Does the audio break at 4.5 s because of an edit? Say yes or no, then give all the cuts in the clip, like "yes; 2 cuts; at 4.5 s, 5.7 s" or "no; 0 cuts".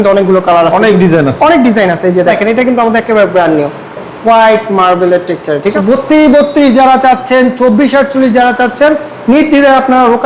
no; 2 cuts; at 2.3 s, 5.7 s